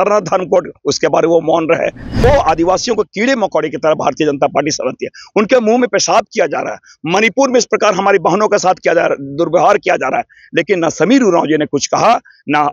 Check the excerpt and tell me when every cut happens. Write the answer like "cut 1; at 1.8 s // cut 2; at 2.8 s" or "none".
cut 1; at 2.2 s